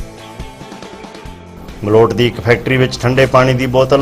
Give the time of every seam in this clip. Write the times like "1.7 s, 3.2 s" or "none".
none